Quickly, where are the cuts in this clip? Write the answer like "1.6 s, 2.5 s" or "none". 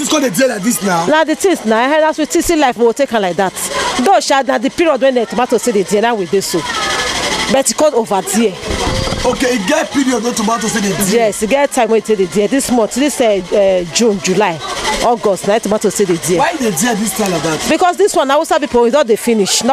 none